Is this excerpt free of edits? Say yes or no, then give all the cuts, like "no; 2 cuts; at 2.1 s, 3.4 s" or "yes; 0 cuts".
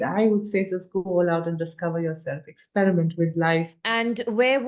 no; 1 cut; at 3.8 s